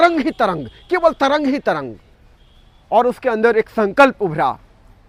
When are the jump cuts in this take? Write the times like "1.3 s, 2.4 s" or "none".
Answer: none